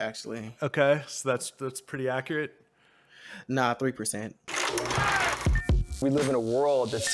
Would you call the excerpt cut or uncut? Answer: cut